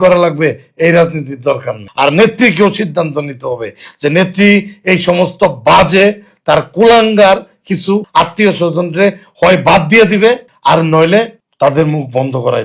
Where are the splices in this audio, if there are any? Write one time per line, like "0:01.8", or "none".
0:01.8
0:08.1
0:10.5
0:11.4